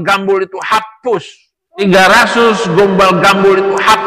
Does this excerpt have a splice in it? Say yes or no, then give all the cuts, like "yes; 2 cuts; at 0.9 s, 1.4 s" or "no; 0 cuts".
yes; 2 cuts; at 1.8 s, 2.5 s